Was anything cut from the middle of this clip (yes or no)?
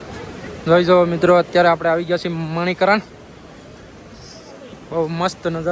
no